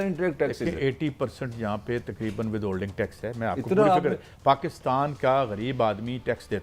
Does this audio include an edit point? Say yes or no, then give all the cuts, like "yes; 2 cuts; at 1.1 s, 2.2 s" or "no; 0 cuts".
no; 0 cuts